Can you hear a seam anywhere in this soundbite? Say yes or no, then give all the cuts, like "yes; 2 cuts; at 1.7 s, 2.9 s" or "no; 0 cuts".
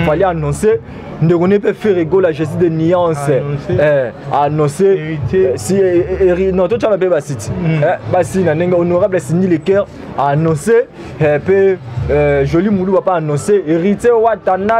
no; 0 cuts